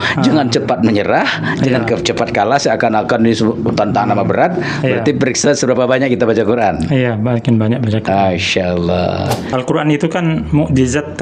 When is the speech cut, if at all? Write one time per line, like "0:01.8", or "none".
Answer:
0:09.5